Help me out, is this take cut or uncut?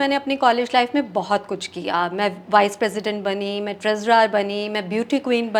uncut